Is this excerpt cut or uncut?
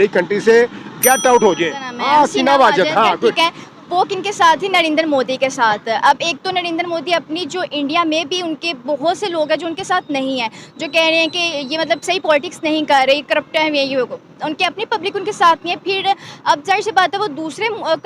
cut